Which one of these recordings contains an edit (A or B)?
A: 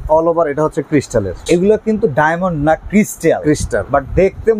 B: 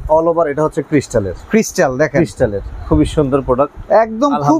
A